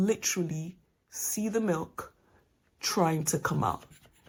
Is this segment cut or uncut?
uncut